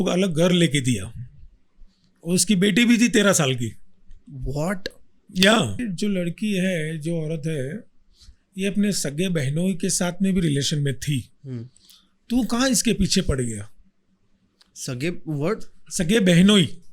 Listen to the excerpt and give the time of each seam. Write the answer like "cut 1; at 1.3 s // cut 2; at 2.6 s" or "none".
cut 1; at 5.8 s